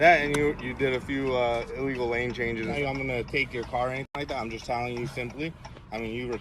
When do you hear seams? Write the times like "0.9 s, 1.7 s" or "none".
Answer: 2.8 s